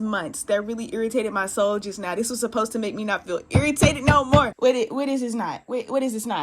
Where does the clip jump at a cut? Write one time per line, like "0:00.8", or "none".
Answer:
0:04.5

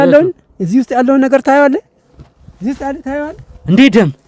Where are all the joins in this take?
none

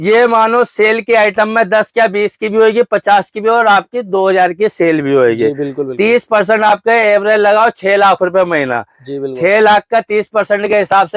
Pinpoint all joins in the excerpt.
none

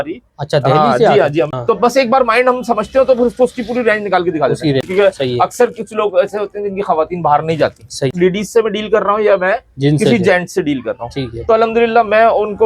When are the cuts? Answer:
0:01.5
0:04.9
0:08.1

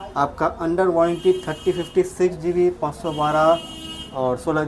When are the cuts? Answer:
none

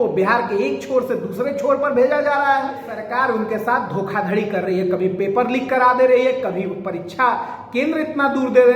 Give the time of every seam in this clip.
0:03.0

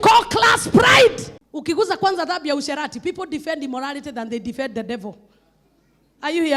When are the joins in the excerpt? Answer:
0:01.4

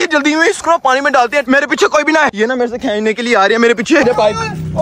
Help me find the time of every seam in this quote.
0:01.4
0:02.3
0:04.0

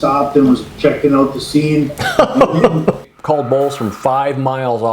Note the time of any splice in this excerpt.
0:02.7

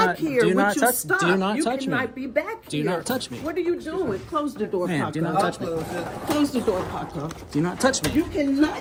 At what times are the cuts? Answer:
none

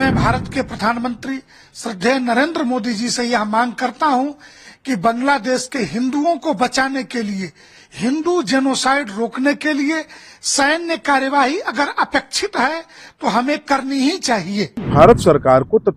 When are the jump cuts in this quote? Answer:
0:14.9

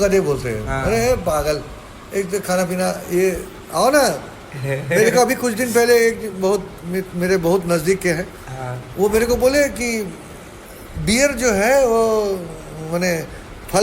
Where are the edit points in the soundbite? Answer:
none

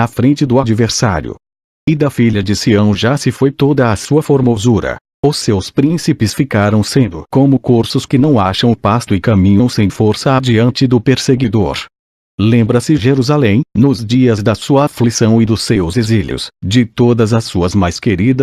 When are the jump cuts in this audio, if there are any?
0:09.2

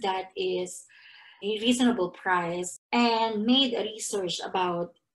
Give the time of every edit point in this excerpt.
0:01.4
0:02.7

